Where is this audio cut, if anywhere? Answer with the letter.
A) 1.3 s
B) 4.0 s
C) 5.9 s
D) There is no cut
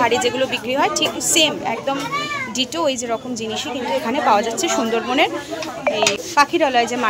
C